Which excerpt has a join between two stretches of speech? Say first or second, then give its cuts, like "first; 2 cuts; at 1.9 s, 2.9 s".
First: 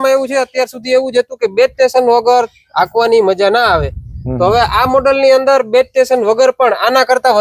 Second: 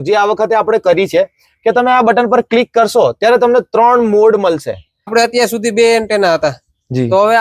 second; 1 cut; at 4.9 s